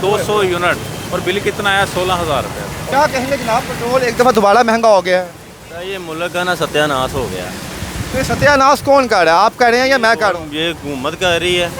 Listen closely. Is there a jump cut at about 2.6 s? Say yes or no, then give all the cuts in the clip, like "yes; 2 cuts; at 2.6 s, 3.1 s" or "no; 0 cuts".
no; 0 cuts